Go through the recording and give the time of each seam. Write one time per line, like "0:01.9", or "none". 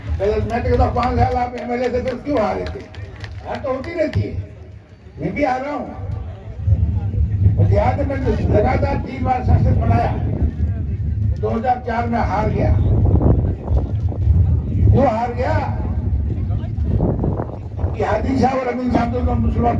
none